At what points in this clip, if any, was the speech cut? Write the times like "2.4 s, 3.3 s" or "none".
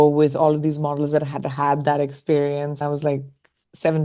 2.8 s